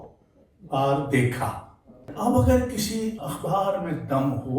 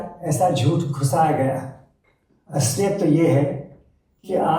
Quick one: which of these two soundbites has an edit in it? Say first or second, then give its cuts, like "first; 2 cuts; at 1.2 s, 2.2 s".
first; 2 cuts; at 2.0 s, 3.2 s